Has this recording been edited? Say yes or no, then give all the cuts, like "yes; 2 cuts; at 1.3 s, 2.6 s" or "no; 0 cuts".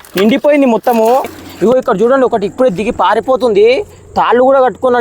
yes; 1 cut; at 1.4 s